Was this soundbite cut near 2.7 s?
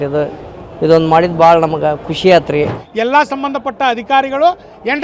yes; 1 cut; at 2.7 s

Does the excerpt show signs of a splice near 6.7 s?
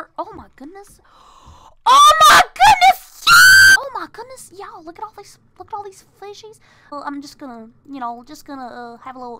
no; 1 cut; at 3.7 s

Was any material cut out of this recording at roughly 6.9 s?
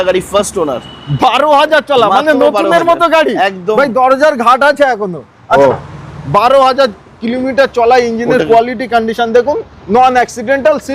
no; 1 cut; at 5.6 s

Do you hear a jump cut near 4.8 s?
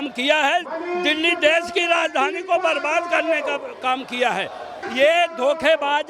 yes; 1 cut; at 4.8 s

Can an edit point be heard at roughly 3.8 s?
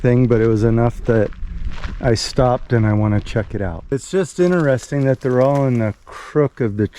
yes; 1 cut; at 3.8 s

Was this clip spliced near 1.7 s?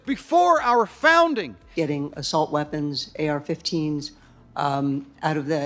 yes; 1 cut; at 1.7 s

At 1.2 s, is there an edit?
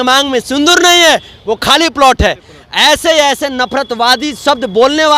no; 0 cuts

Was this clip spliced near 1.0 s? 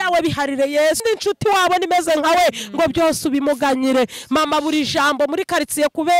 yes; 1 cut; at 1.0 s

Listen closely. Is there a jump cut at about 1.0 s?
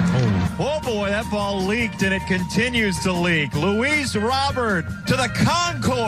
no; 1 cut; at 4.9 s

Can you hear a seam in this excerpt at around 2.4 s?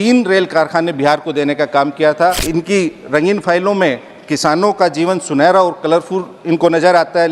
yes; 1 cut; at 2.4 s

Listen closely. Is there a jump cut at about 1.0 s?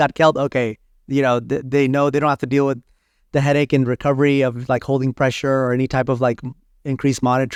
no; 0 cuts

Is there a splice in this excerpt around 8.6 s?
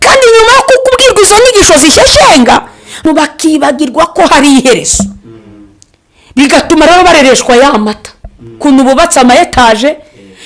no; 1 cut; at 3.0 s

